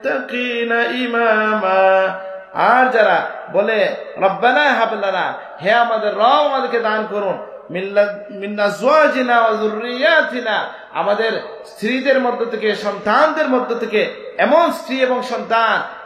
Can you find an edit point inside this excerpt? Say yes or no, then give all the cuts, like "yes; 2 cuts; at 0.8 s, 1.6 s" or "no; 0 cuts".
no; 0 cuts